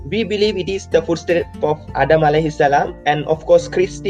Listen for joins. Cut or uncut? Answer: cut